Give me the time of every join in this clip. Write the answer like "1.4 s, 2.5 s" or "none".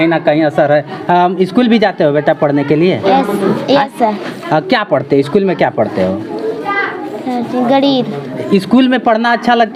none